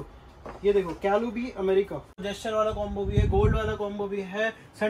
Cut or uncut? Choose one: cut